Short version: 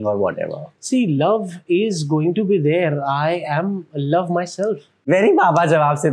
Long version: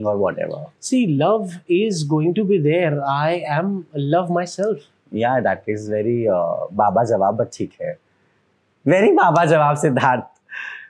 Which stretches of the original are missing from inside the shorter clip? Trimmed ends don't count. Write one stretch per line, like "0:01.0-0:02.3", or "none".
0:04.9-0:08.7